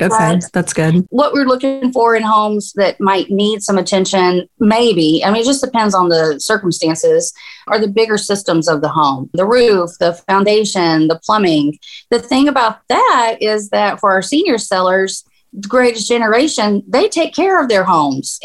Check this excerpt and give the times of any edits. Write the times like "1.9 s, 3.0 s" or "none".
1.1 s